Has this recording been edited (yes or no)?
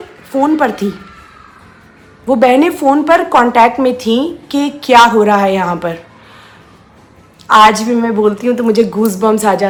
no